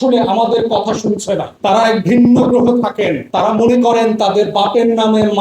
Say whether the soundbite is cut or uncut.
cut